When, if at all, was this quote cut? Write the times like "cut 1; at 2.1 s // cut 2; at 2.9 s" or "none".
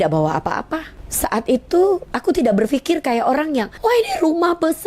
cut 1; at 1.0 s // cut 2; at 3.7 s